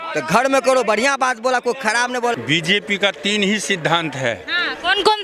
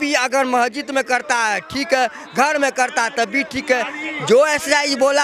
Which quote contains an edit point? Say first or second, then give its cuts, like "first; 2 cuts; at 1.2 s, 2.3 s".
first; 1 cut; at 2.3 s